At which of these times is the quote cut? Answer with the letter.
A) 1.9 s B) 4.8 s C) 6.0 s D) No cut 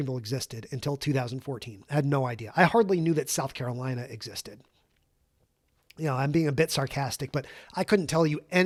D